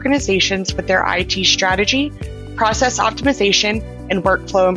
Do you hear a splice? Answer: no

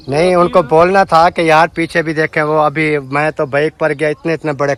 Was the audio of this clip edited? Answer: no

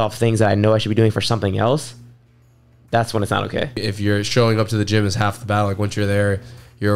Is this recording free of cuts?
no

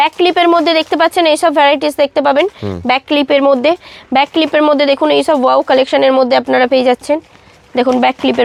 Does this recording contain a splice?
no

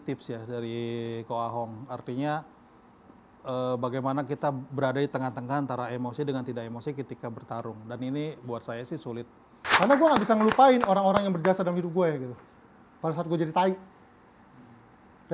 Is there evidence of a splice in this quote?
yes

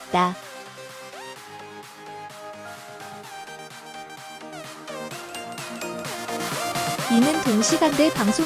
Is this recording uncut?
no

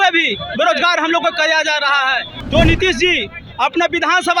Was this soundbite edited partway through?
yes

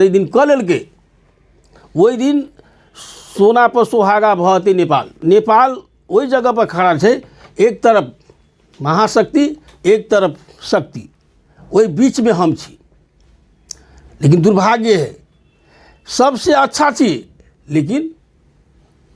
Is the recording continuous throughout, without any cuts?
no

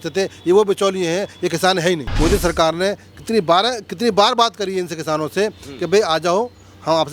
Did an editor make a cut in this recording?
yes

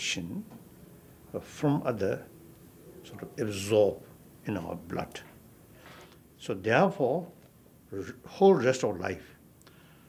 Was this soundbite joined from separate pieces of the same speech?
no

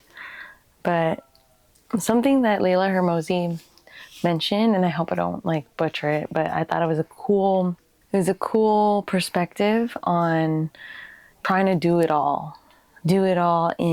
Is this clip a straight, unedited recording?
yes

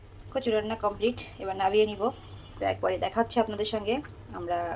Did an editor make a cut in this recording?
no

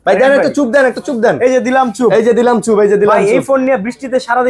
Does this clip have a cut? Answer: no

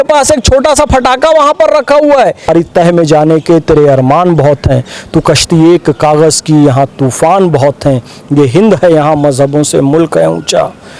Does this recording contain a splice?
yes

